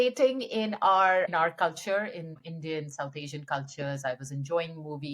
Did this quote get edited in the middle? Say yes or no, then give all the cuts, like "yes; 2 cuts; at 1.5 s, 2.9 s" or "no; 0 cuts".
yes; 2 cuts; at 1.3 s, 2.4 s